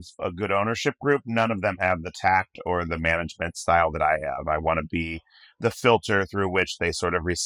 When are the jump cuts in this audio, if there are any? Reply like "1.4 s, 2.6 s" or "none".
none